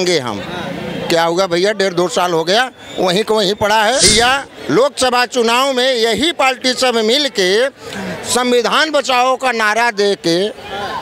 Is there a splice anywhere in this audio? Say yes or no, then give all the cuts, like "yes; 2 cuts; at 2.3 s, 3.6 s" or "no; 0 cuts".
yes; 1 cut; at 4.1 s